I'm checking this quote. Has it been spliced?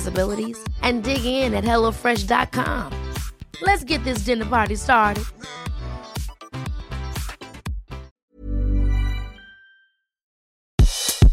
yes; 1 cut; at 10.4 s

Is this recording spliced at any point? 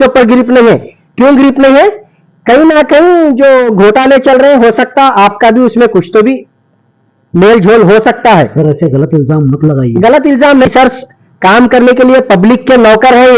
yes; 1 cut; at 10.7 s

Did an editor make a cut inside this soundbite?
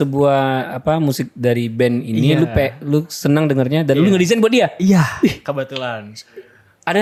no; 0 cuts

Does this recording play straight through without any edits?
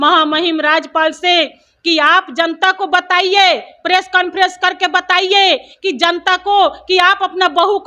yes; 0 cuts

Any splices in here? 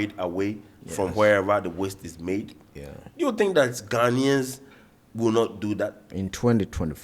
yes; 1 cut; at 6.0 s

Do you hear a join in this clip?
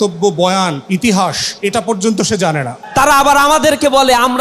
yes; 3 cuts; at 0.8 s, 1.5 s, 2.7 s

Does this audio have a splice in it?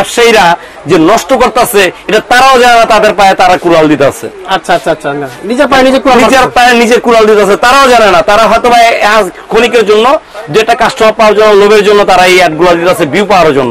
no; 0 cuts

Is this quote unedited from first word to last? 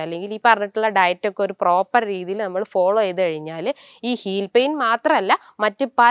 yes; 0 cuts

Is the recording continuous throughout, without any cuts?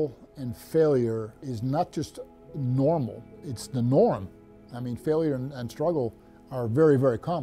yes; 0 cuts

